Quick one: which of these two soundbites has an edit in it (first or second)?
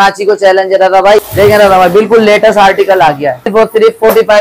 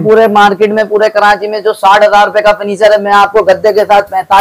first